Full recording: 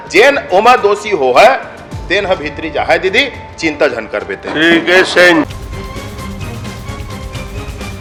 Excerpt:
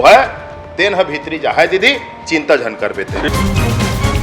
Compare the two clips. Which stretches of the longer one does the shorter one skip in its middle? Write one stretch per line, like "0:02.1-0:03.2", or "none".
0:04.6-0:06.1